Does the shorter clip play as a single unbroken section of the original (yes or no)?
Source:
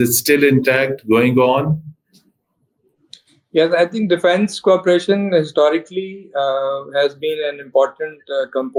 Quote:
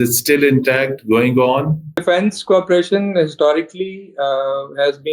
no